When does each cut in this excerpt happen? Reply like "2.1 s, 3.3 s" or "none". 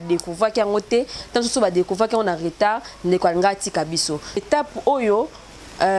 4.4 s